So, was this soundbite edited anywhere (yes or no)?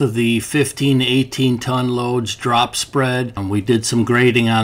no